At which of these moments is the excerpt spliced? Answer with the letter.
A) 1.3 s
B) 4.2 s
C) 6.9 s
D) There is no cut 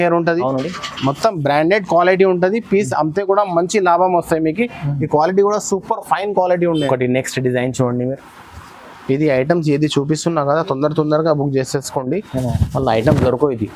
C